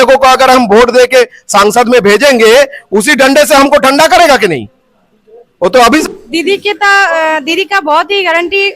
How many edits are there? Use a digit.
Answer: 1